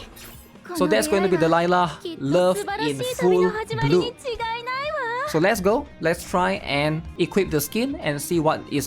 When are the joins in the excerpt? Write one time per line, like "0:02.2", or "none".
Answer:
0:07.3